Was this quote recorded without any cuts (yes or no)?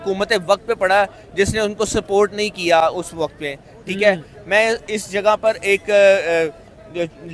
yes